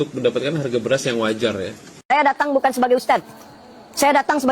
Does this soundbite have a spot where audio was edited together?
yes; 1 cut; at 1.9 s

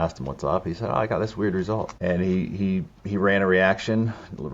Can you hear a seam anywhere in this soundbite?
yes; 1 cut; at 1.9 s

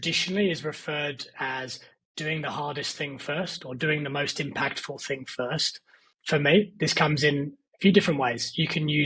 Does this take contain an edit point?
yes; 1 cut; at 6.1 s

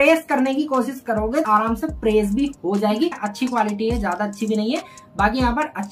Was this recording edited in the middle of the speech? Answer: yes; 2 cuts; at 1.5 s, 3.3 s

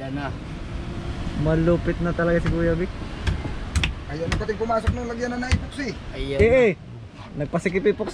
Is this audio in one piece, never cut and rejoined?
yes; 0 cuts

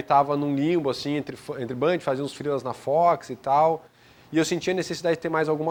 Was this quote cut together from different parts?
no; 0 cuts

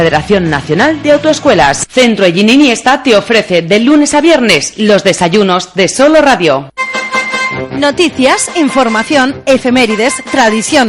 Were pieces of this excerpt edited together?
yes; 1 cut; at 6.8 s

